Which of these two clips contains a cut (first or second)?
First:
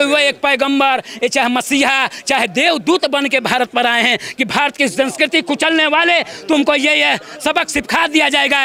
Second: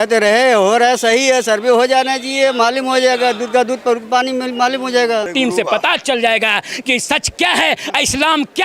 second